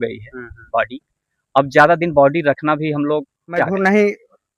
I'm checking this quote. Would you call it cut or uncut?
cut